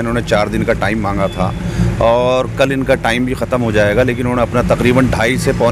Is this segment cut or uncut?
uncut